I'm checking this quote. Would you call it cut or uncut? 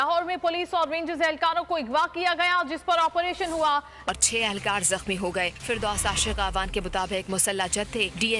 cut